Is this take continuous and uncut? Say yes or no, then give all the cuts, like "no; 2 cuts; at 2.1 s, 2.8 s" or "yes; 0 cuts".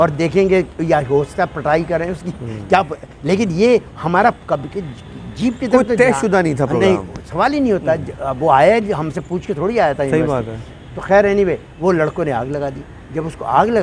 yes; 0 cuts